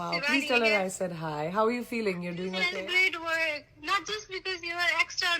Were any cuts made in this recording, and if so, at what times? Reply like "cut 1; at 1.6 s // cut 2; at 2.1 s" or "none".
cut 1; at 2.7 s